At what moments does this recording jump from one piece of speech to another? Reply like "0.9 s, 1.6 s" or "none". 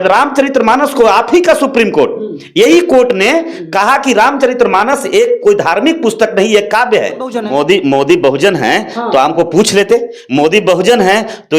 7.4 s